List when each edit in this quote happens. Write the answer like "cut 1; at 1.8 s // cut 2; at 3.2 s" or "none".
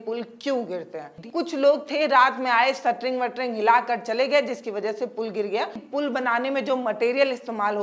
cut 1; at 1.2 s // cut 2; at 5.8 s